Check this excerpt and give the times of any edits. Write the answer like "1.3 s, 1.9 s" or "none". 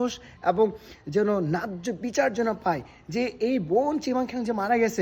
none